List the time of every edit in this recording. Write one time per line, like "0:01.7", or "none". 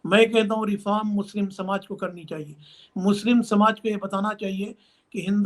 none